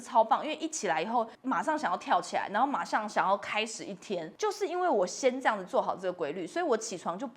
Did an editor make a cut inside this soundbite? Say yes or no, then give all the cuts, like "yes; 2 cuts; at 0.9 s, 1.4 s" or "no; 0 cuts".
yes; 2 cuts; at 1.4 s, 4.3 s